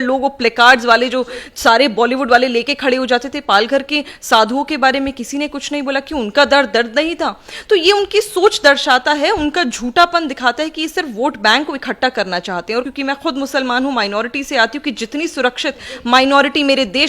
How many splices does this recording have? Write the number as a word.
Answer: one